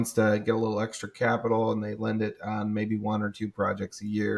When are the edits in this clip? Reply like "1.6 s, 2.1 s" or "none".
none